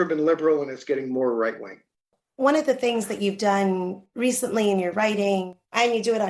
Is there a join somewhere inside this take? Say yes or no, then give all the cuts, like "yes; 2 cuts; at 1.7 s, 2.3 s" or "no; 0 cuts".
no; 0 cuts